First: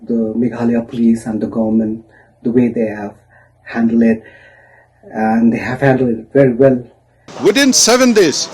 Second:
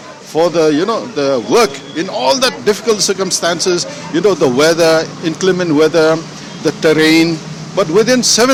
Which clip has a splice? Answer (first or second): first